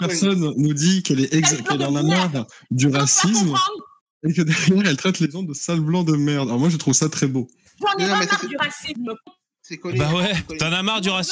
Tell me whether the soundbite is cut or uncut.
uncut